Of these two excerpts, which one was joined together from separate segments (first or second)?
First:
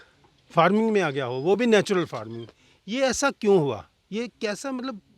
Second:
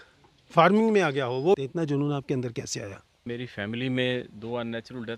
second